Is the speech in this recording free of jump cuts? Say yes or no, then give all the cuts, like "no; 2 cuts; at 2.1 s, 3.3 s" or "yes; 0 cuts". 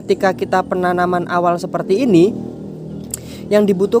yes; 0 cuts